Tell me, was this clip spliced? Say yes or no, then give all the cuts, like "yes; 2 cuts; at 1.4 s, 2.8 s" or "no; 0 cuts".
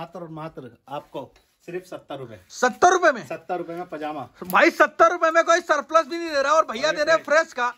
no; 0 cuts